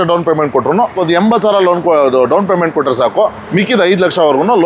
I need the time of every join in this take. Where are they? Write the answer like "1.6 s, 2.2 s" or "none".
1.0 s

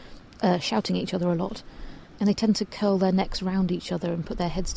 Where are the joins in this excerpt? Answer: 2.2 s

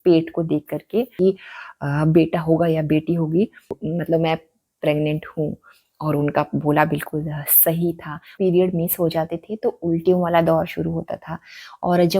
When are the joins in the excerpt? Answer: 1.1 s, 3.7 s, 8.3 s

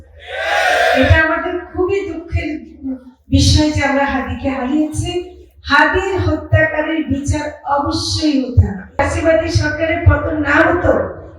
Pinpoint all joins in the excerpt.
9.0 s

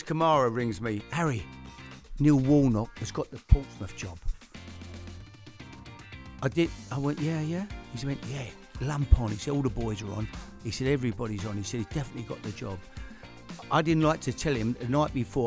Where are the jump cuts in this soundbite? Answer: 1.0 s

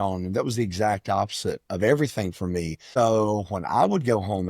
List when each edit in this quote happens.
2.8 s

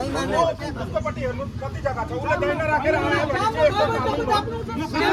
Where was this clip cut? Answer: none

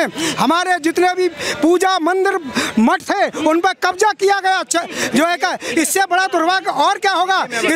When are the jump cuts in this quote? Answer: none

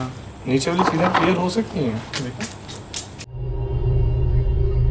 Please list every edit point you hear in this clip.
3.3 s

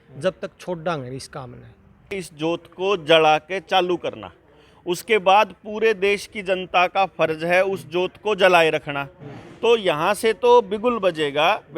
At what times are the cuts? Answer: 2.2 s

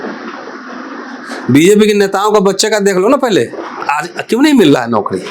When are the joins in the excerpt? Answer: 3.7 s

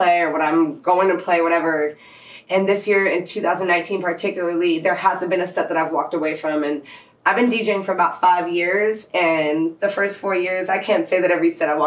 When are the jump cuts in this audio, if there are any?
none

